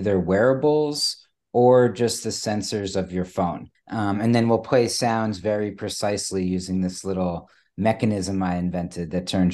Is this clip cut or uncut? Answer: cut